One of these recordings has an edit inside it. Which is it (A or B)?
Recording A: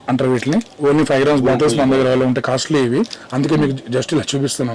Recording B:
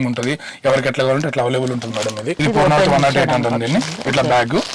B